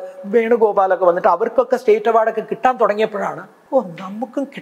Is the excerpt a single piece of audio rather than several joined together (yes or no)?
no